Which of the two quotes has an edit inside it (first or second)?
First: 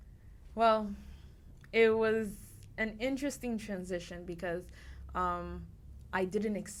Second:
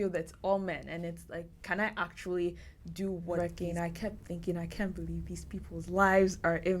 second